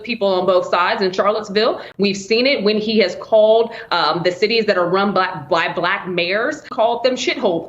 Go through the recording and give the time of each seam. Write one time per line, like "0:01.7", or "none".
0:06.7